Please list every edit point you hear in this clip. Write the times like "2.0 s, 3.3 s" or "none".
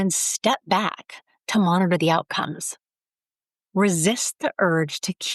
none